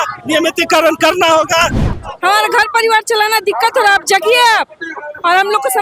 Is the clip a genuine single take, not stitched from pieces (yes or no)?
no